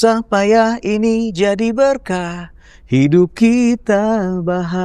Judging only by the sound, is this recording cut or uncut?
uncut